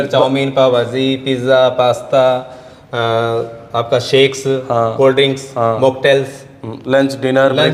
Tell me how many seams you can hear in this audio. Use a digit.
0